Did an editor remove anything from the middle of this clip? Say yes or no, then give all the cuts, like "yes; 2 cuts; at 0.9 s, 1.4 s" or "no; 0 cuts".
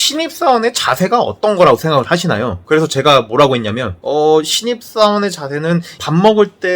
no; 0 cuts